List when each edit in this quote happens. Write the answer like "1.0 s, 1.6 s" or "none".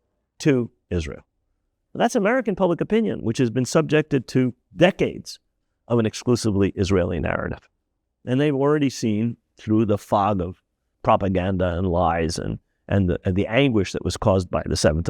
5.5 s